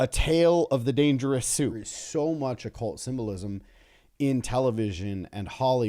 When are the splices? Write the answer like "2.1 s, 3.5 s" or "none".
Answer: 1.9 s